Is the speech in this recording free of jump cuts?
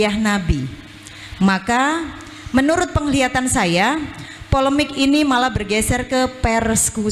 yes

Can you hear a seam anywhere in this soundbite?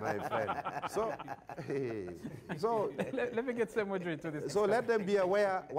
no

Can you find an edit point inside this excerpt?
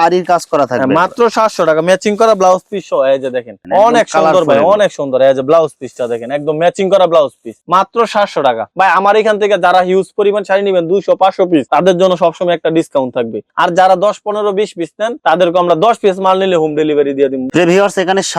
no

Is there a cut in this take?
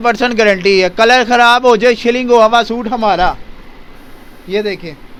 no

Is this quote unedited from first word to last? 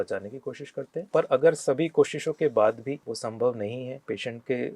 no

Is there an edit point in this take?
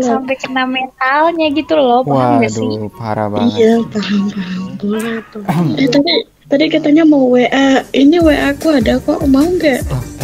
yes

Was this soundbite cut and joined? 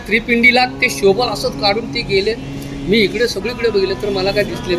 no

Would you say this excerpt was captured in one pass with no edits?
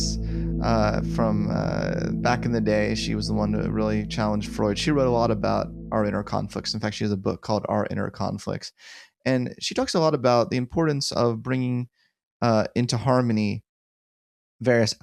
yes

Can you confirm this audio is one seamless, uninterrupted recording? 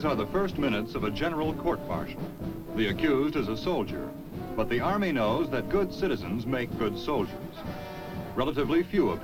yes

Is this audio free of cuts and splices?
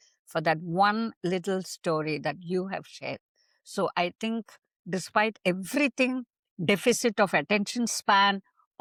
yes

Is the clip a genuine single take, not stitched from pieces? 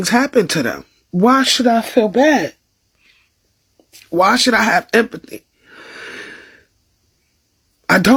yes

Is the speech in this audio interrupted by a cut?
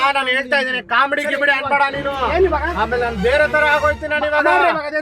no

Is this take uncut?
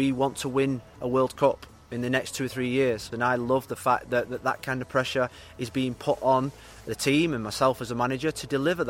no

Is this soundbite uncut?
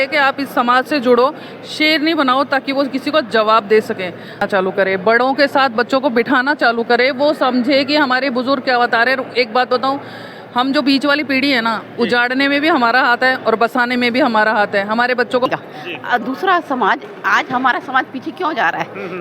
no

